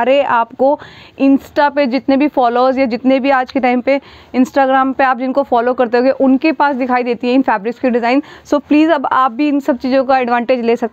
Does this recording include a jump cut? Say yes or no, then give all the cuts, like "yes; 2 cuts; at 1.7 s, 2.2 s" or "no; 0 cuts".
no; 0 cuts